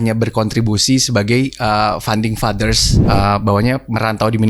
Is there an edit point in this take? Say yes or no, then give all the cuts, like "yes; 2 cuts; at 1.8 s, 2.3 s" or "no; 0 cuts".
yes; 1 cut; at 2.9 s